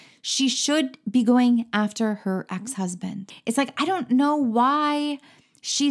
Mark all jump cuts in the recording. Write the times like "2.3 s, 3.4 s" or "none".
3.3 s